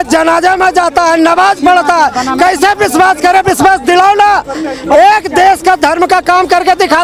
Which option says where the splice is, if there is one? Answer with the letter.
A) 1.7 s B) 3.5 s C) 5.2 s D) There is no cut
D